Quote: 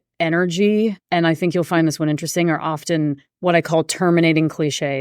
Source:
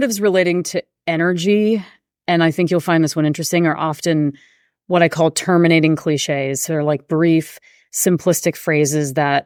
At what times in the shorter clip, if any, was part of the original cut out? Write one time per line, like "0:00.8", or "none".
0:01.0
0:03.3